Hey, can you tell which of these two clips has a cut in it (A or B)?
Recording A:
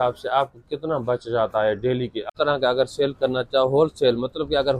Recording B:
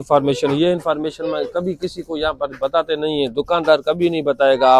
A